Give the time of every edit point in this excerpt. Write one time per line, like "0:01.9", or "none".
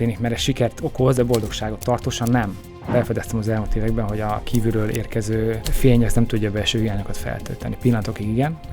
0:01.2
0:02.9
0:05.7